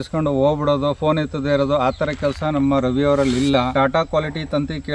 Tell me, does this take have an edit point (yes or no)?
yes